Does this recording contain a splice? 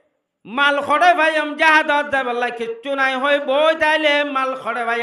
no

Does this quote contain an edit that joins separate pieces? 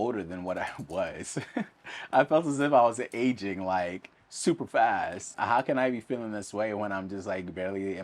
yes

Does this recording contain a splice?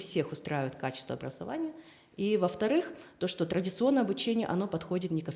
no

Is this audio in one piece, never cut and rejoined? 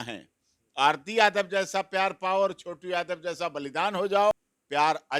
yes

